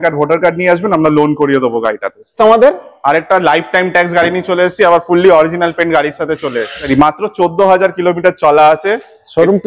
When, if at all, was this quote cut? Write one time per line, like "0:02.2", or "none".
0:02.3
0:06.8

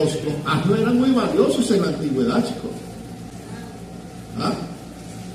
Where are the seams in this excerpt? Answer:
0:03.3

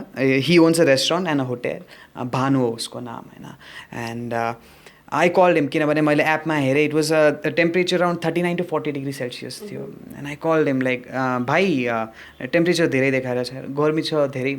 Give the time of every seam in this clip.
none

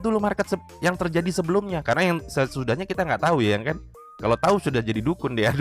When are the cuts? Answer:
none

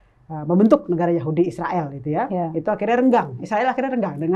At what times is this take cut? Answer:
none

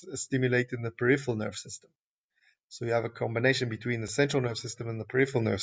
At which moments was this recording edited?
0:04.1

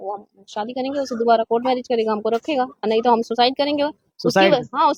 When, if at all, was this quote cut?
none

